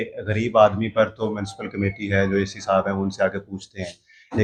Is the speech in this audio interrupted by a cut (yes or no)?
no